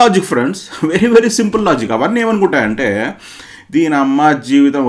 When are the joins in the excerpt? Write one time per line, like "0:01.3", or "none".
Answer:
none